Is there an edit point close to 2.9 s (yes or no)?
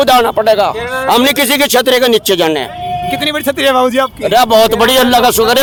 no